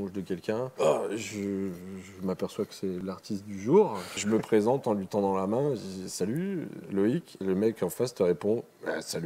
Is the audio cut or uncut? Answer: cut